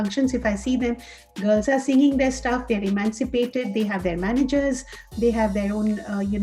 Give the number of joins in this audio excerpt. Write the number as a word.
zero